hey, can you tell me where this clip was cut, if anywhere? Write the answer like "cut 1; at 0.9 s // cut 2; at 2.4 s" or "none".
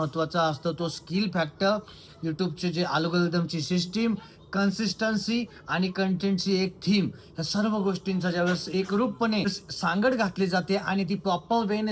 cut 1; at 9.5 s